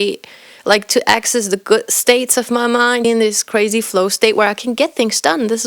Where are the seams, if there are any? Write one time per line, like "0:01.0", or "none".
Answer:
0:03.0

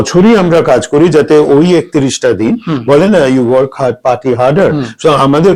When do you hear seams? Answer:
none

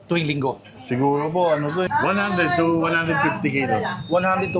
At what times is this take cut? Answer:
0:01.9

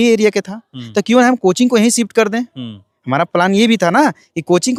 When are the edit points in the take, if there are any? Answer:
none

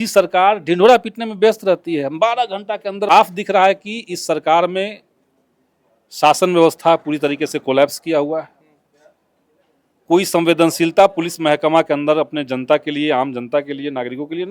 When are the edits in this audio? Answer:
0:03.1

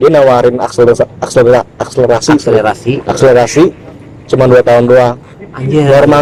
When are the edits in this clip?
none

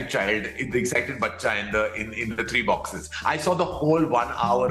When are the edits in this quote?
none

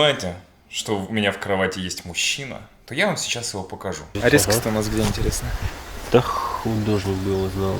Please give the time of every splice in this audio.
0:04.2

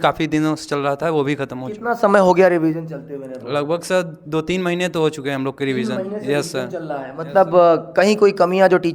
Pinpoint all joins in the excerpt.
none

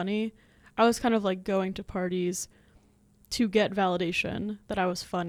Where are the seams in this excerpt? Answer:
none

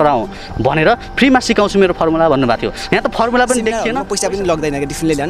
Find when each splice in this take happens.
0:02.8
0:03.9

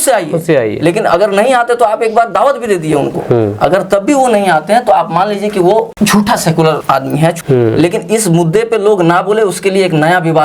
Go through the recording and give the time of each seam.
0:05.9
0:07.2

